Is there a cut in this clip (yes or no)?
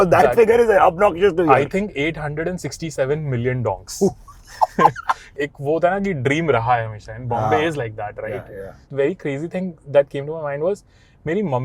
yes